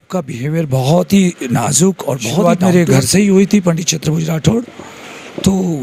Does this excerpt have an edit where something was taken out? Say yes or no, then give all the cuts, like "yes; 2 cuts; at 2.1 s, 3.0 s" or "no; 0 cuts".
yes; 1 cut; at 2.4 s